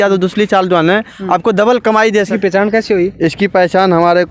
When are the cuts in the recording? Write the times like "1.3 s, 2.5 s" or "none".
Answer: 2.3 s